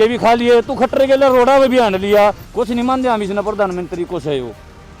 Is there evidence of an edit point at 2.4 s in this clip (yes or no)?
yes